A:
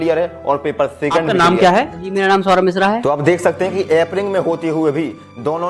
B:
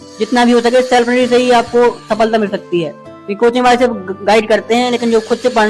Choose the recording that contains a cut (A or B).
A